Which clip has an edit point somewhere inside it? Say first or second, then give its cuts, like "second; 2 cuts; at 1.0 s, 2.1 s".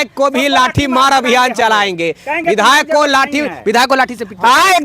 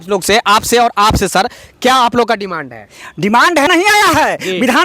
second; 1 cut; at 3.7 s